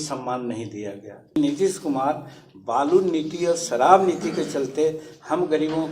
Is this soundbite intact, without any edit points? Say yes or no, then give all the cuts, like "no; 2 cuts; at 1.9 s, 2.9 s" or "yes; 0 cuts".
no; 1 cut; at 1.3 s